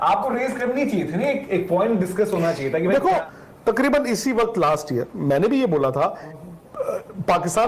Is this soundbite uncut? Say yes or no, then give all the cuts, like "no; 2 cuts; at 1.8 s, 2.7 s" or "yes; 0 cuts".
no; 2 cuts; at 3.3 s, 6.3 s